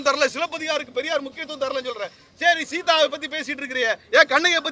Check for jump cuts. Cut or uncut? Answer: uncut